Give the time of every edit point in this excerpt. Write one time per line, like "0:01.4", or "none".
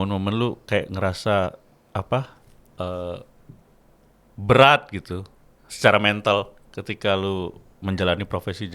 none